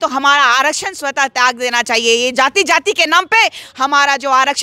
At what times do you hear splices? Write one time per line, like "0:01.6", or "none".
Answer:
none